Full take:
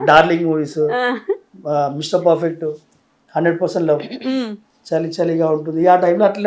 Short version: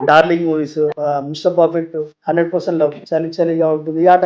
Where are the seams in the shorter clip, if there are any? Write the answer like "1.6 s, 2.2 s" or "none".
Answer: 0.9 s, 2.1 s, 3.0 s